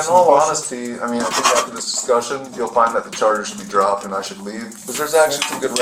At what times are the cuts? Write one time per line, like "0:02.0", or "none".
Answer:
0:04.8